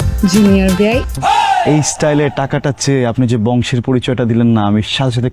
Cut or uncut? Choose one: cut